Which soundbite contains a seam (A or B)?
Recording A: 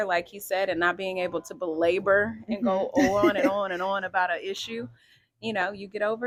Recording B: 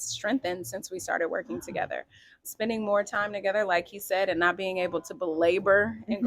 B